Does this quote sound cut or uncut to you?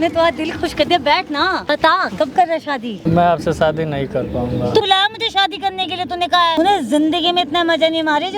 cut